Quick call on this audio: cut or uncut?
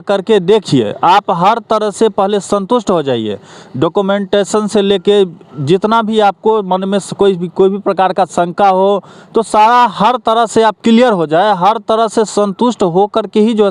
uncut